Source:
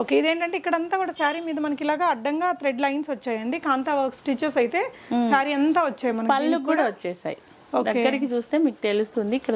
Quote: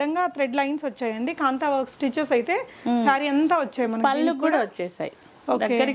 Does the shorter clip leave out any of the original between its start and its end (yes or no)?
no